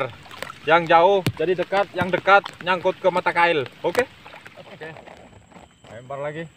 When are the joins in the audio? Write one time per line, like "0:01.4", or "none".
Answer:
0:04.6